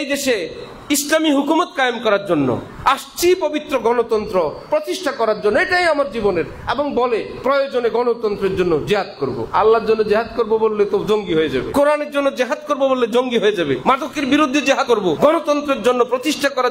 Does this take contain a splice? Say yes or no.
yes